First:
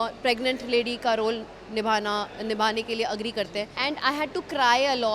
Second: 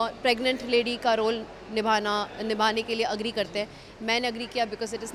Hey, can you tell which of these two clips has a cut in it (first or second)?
first